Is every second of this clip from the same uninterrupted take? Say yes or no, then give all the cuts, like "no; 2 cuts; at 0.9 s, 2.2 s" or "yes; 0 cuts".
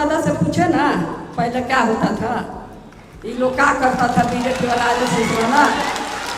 yes; 0 cuts